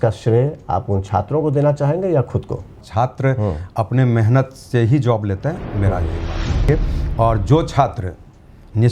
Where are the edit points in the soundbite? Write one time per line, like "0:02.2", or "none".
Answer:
0:02.8
0:06.7